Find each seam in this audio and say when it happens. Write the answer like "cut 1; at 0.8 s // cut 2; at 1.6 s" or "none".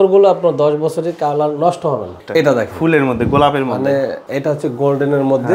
cut 1; at 2.2 s // cut 2; at 4.2 s